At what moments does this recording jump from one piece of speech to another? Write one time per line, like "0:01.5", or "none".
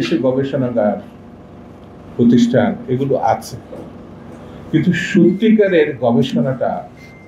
none